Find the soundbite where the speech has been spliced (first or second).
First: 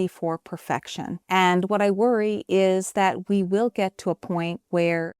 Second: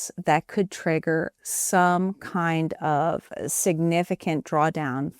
first